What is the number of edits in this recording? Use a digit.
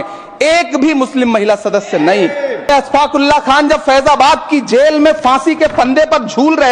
1